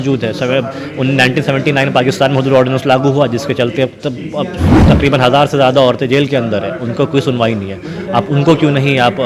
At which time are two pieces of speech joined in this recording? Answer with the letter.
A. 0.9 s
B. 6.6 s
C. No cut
C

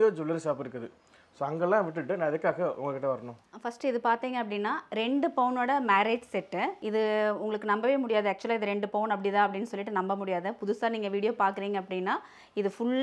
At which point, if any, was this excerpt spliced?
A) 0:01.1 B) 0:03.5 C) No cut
B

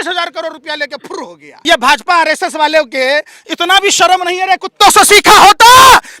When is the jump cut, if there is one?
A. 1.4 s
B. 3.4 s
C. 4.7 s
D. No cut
A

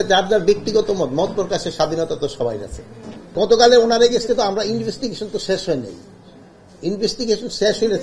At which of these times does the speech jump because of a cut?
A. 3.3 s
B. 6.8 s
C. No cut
A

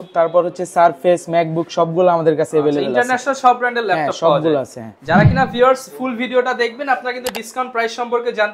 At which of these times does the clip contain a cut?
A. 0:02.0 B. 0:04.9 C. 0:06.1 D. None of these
D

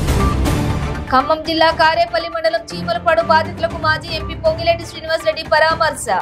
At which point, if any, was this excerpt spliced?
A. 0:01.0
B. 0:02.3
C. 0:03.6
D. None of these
A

